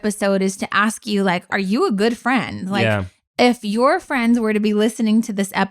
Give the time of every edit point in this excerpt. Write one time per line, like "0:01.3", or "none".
0:01.5

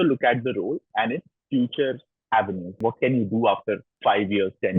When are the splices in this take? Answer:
0:02.1
0:03.9

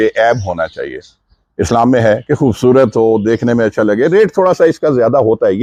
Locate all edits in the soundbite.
none

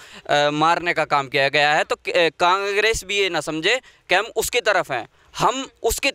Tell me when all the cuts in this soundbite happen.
none

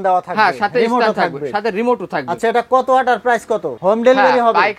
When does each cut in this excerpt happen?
0:03.7

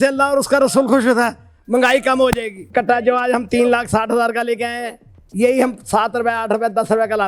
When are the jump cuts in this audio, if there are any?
0:02.6

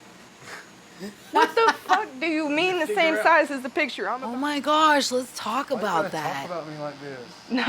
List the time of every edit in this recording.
0:04.0

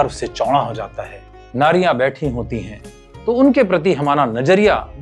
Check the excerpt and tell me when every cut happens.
0:01.3

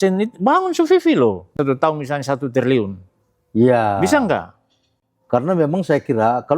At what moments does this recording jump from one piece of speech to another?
0:01.5

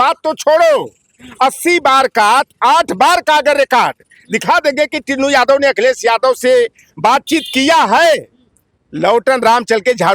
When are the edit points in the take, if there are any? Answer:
none

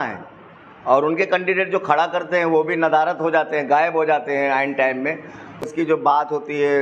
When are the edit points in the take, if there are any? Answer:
0:05.6

